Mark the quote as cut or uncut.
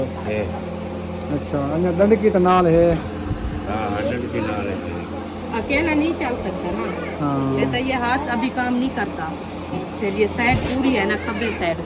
uncut